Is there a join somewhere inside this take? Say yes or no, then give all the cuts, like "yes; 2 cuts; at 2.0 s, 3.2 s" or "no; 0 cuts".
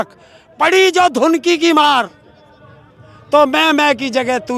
no; 0 cuts